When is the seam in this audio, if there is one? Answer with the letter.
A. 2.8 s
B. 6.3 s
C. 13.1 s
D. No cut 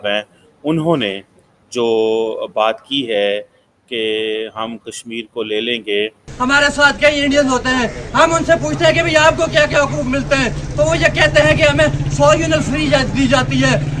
B